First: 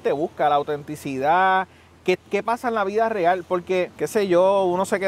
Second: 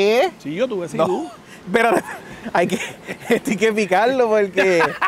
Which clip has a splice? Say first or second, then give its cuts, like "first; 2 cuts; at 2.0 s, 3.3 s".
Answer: first; 1 cut; at 4.0 s